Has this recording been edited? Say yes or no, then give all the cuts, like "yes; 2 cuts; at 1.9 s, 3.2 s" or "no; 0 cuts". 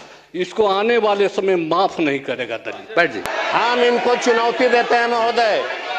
yes; 1 cut; at 3.3 s